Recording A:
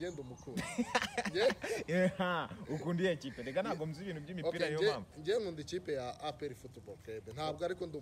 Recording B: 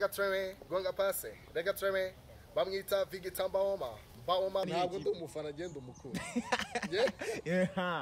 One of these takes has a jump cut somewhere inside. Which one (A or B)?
B